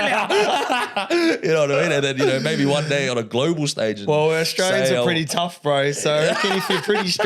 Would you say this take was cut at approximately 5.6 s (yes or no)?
no